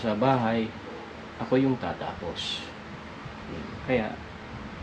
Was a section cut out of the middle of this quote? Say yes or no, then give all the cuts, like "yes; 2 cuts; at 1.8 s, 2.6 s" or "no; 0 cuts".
no; 0 cuts